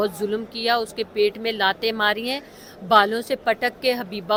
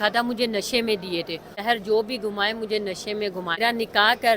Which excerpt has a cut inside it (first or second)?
second